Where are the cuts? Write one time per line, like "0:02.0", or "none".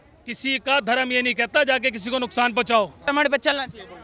0:03.0